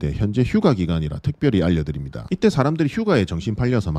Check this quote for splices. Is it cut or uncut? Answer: uncut